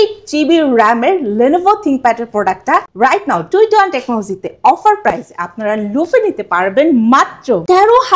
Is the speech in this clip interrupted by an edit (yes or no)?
no